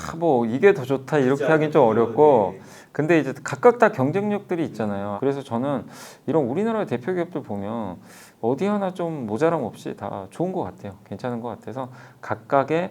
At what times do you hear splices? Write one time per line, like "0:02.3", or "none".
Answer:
0:05.1